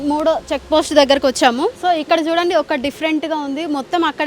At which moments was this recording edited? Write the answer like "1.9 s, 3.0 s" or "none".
1.8 s